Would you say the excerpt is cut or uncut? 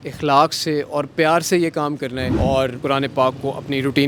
uncut